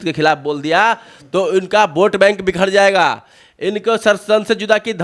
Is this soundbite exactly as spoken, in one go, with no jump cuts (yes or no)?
yes